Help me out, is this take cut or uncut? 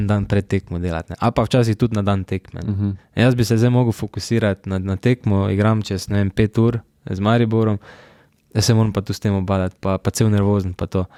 uncut